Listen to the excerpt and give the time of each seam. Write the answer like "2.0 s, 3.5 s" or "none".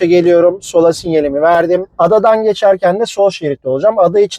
1.9 s